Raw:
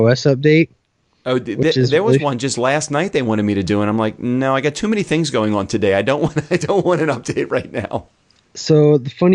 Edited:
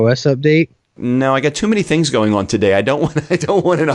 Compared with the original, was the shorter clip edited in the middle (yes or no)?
yes